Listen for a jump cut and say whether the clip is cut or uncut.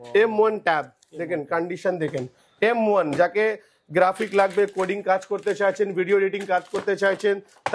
uncut